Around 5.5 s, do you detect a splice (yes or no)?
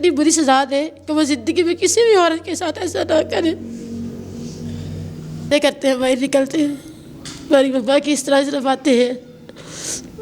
yes